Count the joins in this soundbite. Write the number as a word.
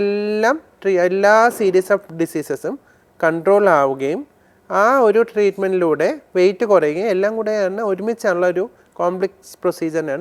zero